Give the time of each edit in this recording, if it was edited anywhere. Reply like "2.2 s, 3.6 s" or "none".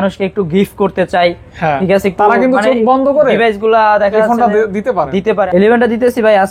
5.5 s